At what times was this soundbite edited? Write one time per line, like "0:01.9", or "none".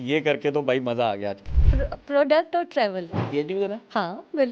0:03.1